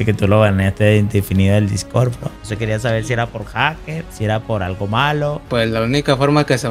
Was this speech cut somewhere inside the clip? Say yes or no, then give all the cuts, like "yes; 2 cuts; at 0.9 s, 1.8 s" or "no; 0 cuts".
yes; 1 cut; at 2.4 s